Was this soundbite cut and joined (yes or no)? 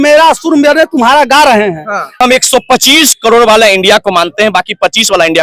yes